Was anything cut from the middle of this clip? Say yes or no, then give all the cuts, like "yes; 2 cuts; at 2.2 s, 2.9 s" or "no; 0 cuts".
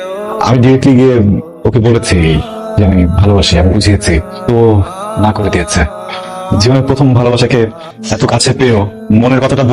no; 0 cuts